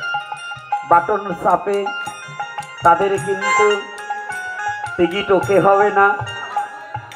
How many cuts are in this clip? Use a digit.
0